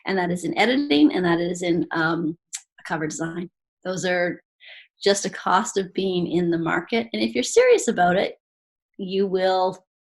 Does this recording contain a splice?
no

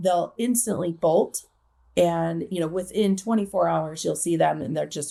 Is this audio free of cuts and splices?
yes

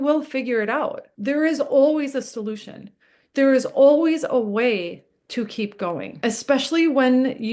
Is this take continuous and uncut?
no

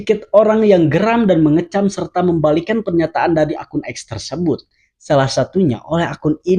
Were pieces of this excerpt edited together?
no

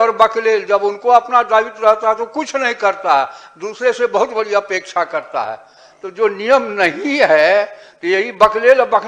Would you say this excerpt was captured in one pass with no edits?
yes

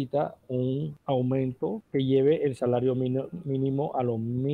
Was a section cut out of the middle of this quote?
yes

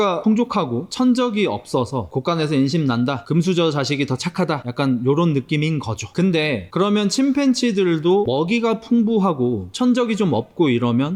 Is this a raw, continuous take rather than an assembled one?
yes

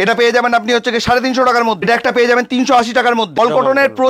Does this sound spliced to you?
yes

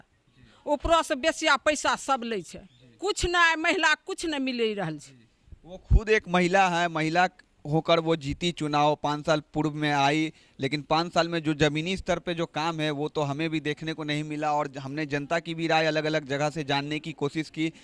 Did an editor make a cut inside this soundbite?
no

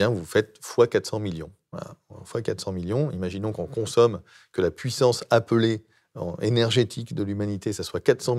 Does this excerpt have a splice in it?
no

